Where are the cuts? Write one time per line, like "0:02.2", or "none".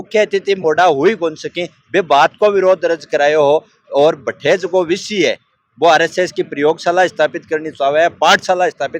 none